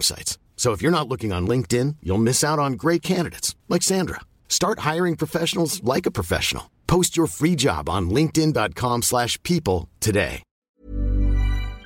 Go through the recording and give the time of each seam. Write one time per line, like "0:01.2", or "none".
0:10.6